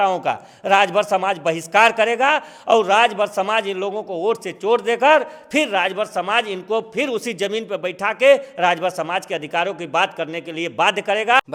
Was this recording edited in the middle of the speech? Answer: no; 0 cuts

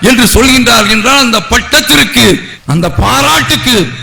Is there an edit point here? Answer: no; 0 cuts

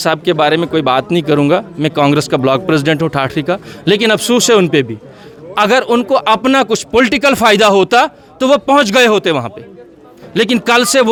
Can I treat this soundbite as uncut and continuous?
yes; 0 cuts

